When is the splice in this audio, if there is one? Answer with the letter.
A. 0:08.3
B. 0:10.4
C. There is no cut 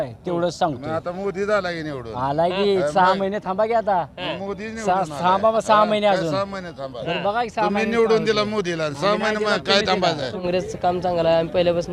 B